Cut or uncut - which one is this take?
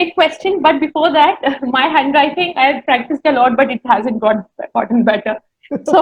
uncut